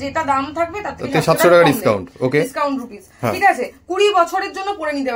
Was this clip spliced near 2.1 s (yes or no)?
no